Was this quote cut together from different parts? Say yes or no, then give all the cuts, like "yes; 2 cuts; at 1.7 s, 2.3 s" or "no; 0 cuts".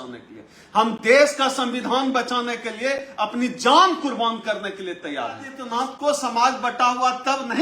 yes; 1 cut; at 5.6 s